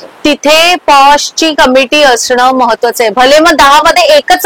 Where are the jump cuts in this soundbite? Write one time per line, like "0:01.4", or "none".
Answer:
none